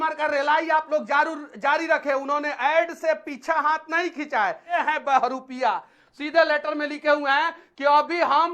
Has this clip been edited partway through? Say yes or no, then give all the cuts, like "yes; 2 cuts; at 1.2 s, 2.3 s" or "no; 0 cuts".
yes; 1 cut; at 4.8 s